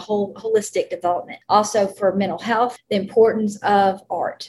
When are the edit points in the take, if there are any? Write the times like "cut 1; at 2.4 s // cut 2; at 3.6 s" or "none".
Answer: cut 1; at 1.3 s // cut 2; at 2.8 s